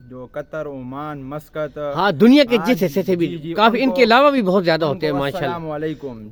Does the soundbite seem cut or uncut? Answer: uncut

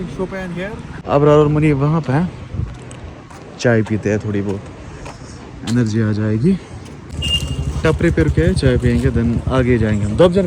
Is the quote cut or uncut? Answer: cut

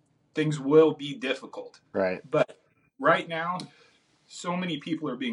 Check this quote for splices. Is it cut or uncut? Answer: uncut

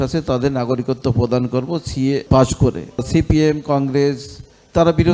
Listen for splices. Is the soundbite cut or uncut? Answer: cut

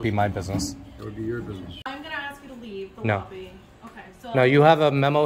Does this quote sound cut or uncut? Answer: cut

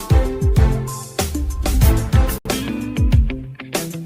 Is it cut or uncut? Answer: cut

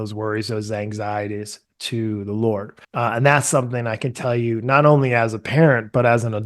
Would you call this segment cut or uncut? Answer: cut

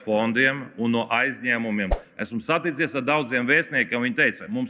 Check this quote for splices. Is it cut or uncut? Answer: cut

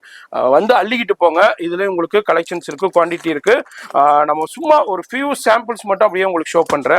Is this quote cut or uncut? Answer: uncut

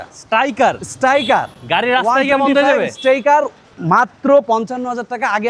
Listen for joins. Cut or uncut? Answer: uncut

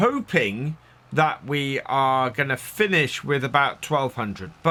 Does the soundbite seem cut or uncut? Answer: uncut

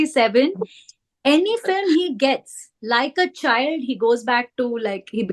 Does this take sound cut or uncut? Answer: uncut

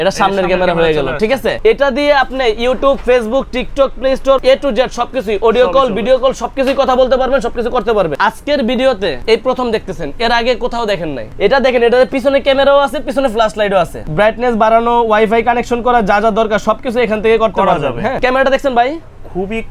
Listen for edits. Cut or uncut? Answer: cut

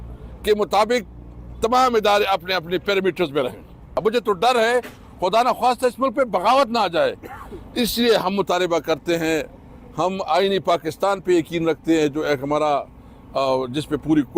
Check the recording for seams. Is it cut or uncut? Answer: cut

